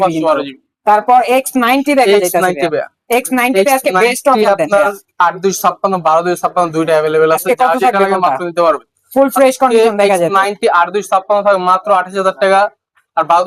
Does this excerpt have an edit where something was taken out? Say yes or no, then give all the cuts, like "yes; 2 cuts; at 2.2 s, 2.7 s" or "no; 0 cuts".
no; 0 cuts